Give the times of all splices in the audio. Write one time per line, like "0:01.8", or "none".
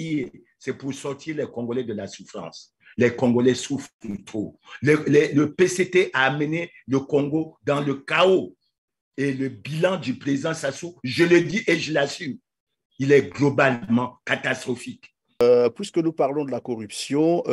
0:15.4

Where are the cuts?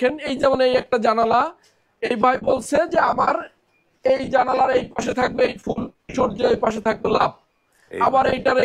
0:06.0

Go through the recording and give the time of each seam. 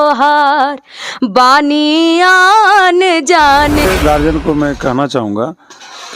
0:03.8

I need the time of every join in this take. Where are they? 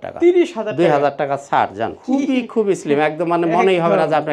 0:02.0

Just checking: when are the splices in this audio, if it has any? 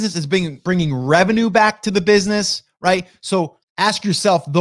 0:03.6

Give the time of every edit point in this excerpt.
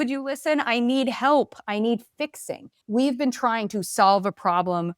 0:02.8

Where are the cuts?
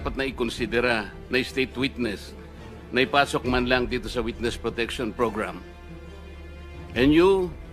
0:05.6
0:06.9

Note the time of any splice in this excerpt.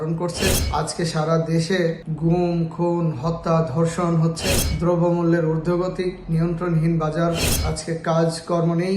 0:07.5

